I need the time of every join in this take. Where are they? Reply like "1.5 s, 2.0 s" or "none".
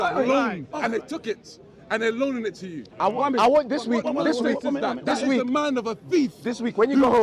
none